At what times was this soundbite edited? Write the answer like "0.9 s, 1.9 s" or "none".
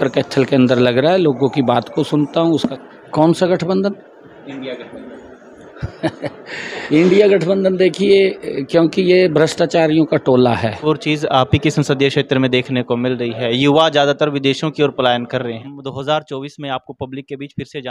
2.6 s, 6.8 s, 10.9 s, 15.6 s